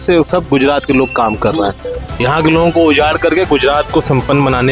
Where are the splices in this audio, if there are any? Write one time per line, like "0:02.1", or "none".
none